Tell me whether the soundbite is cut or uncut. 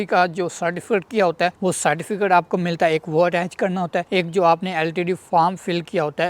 uncut